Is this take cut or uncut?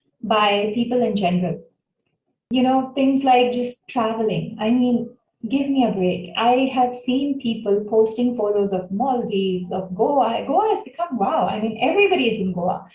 cut